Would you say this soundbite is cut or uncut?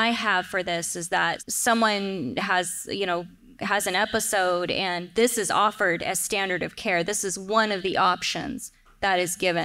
cut